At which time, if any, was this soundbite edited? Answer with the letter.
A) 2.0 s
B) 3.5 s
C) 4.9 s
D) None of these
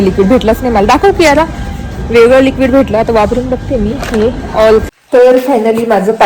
C